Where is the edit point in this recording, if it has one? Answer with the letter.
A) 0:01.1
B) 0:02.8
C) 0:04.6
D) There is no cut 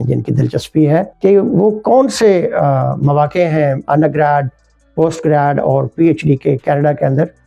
A